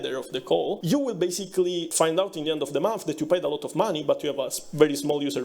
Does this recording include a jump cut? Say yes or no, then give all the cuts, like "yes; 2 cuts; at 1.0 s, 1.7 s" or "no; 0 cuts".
yes; 2 cuts; at 0.8 s, 1.9 s